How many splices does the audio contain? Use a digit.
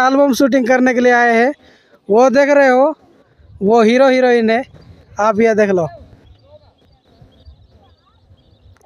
0